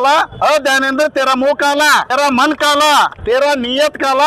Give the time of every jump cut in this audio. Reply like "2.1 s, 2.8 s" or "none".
2.1 s, 3.2 s